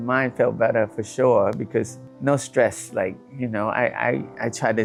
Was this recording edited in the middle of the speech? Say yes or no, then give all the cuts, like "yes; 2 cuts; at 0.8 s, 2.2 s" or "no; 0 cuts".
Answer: no; 0 cuts